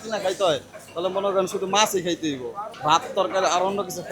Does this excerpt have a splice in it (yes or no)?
yes